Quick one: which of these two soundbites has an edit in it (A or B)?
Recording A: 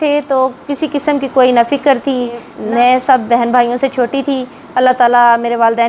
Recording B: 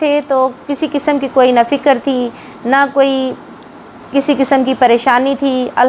A